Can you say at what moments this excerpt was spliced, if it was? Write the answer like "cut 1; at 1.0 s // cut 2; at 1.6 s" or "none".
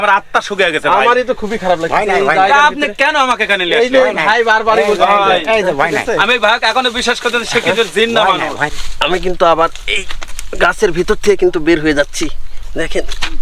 cut 1; at 8.6 s